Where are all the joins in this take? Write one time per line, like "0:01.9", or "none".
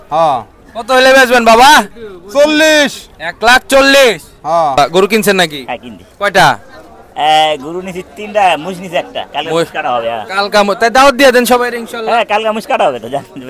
0:04.8